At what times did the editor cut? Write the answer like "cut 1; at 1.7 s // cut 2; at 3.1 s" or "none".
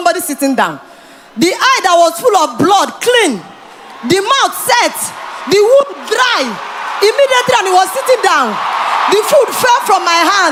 none